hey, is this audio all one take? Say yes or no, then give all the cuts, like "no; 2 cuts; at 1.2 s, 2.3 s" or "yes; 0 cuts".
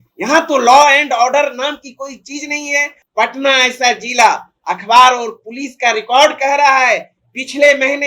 no; 1 cut; at 3.0 s